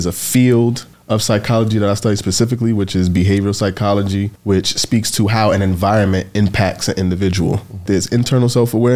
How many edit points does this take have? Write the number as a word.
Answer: three